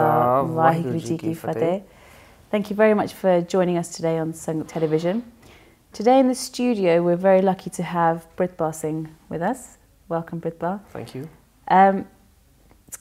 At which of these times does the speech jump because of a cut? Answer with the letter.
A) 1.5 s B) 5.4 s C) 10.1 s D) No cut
D